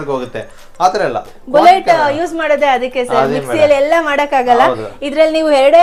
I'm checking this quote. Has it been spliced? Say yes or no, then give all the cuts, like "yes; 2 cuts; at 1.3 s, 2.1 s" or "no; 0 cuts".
no; 0 cuts